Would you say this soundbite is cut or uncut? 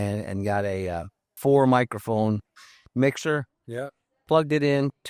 cut